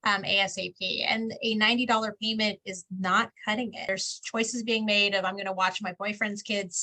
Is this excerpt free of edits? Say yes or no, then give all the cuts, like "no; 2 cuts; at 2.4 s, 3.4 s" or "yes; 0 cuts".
no; 1 cut; at 3.9 s